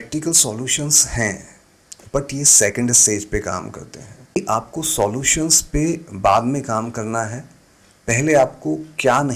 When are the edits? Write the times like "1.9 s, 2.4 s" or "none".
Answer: 4.4 s